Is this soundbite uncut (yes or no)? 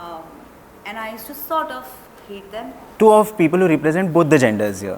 no